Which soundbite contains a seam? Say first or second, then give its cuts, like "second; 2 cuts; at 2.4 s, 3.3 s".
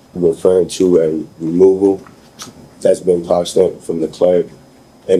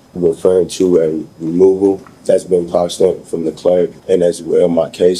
second; 2 cuts; at 2.1 s, 4.0 s